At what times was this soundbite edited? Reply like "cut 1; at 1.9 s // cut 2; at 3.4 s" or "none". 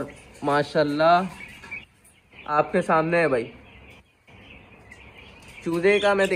none